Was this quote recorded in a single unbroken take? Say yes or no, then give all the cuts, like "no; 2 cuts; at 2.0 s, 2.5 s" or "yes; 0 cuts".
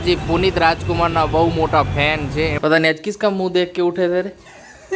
no; 1 cut; at 2.6 s